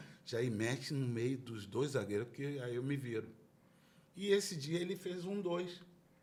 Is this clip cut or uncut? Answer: uncut